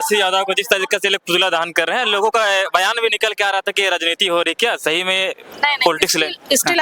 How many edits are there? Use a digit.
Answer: 0